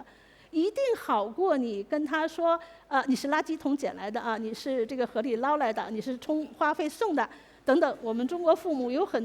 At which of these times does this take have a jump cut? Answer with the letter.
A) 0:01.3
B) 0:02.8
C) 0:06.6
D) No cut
D